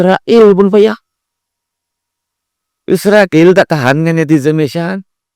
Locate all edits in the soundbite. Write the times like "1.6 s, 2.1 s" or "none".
none